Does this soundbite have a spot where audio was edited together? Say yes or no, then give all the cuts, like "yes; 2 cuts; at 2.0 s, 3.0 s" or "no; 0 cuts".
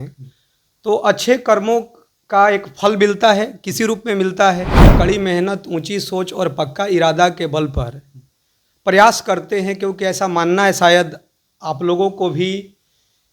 yes; 1 cut; at 4.9 s